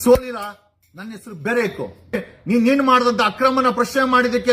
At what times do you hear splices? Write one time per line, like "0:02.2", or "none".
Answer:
0:02.3